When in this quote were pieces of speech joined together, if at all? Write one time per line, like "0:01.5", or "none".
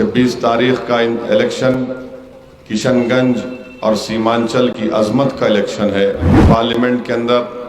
0:06.3